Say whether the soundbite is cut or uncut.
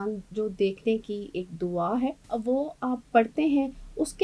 cut